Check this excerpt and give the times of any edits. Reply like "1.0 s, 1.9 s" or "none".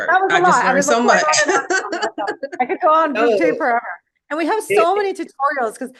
none